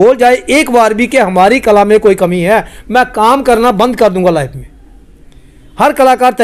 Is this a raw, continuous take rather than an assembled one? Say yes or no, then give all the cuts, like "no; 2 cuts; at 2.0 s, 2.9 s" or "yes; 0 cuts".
yes; 0 cuts